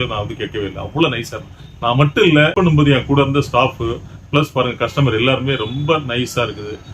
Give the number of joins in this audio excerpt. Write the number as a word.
one